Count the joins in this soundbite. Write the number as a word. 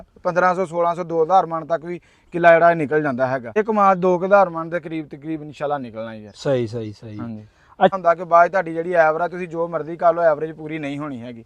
two